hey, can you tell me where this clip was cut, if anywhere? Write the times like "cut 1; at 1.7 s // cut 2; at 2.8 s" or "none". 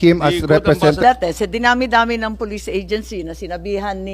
cut 1; at 1.0 s